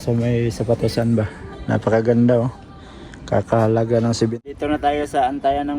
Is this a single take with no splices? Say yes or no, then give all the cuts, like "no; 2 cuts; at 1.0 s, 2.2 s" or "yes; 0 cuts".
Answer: no; 1 cut; at 4.4 s